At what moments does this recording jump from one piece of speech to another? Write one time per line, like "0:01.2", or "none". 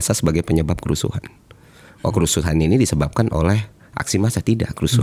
none